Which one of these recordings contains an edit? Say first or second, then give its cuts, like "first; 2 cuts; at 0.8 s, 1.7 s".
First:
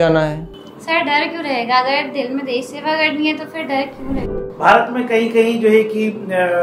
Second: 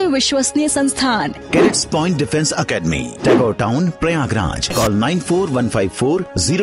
first; 1 cut; at 4.3 s